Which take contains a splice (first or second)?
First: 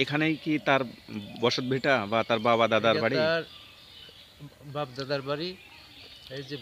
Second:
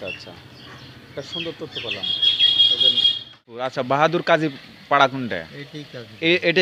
second